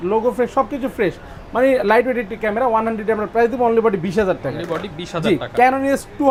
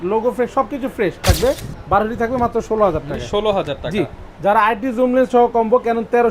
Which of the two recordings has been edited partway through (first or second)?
second